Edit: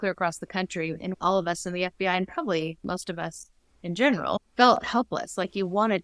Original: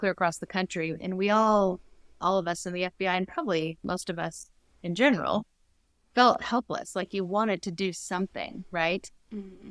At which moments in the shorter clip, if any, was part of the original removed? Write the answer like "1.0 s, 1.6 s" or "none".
1.1 s, 4.5 s